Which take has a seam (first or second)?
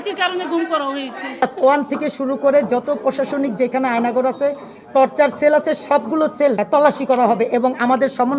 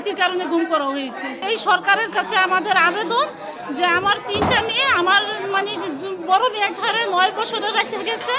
first